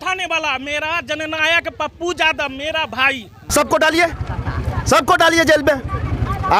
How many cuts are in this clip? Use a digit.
1